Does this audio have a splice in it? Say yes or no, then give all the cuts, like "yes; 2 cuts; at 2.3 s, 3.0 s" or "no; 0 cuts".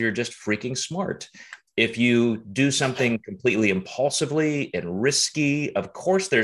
no; 0 cuts